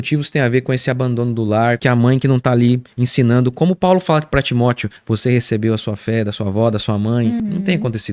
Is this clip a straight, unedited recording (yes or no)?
no